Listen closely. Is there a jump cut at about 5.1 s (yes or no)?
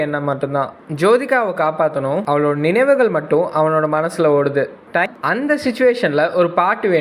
yes